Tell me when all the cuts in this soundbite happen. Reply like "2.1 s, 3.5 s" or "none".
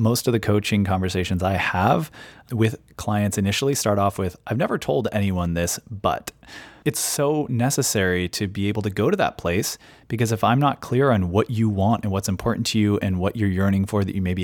6.7 s